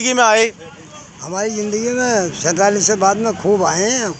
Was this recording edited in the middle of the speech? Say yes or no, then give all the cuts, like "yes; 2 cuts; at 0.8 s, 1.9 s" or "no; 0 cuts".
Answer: no; 0 cuts